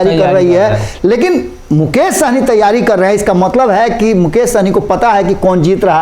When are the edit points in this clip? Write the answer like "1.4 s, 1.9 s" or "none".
none